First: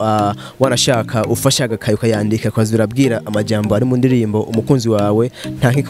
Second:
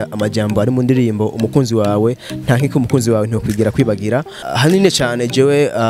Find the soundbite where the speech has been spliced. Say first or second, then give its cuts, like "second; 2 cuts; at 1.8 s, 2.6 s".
second; 1 cut; at 4.4 s